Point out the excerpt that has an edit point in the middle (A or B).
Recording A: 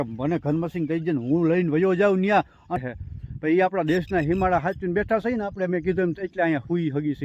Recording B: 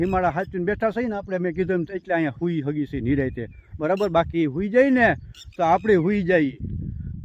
A